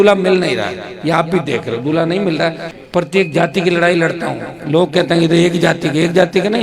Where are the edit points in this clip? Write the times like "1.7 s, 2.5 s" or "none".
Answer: 2.7 s